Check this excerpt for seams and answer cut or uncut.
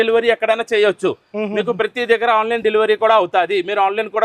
uncut